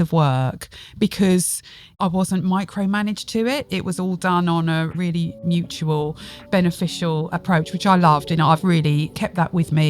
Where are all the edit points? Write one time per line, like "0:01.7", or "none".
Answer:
0:01.8
0:04.9
0:07.3
0:08.7